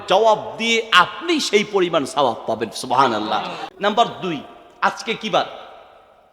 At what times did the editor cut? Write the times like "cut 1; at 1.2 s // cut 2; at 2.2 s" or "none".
cut 1; at 3.6 s